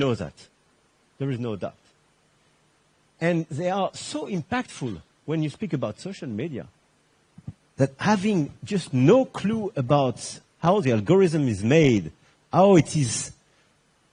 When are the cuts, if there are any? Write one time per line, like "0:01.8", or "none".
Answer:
none